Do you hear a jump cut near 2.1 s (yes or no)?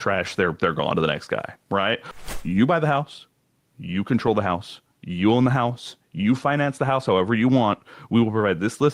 yes